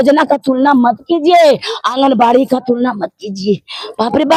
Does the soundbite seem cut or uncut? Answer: uncut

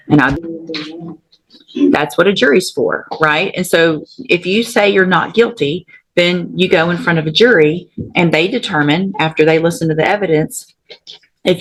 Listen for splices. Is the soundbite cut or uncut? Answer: uncut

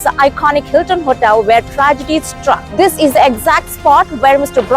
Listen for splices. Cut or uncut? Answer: cut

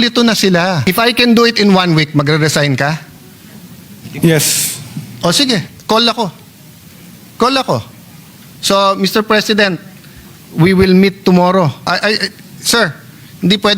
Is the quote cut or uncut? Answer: cut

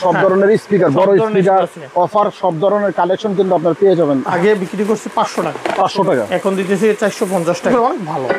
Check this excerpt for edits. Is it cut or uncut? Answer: cut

